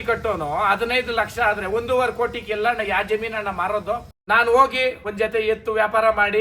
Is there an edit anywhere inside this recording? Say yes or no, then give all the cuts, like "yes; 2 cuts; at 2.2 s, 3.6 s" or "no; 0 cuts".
yes; 2 cuts; at 4.1 s, 5.0 s